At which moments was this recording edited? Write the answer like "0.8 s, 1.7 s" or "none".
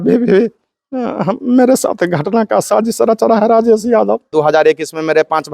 4.3 s